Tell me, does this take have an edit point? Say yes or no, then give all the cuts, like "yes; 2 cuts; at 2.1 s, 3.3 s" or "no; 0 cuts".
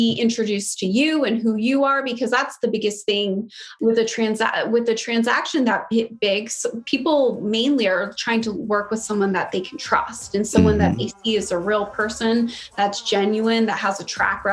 yes; 1 cut; at 3.6 s